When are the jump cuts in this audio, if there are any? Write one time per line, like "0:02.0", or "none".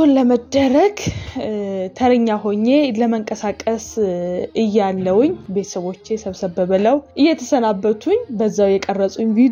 0:04.5
0:05.4
0:07.1